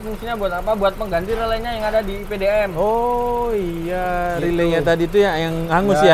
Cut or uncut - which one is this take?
uncut